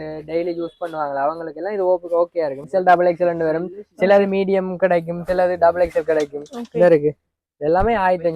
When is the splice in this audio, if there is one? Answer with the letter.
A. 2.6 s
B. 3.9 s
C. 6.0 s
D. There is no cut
A